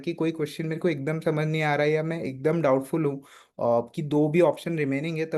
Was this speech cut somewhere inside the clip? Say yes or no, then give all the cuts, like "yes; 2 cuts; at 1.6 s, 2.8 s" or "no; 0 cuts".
no; 0 cuts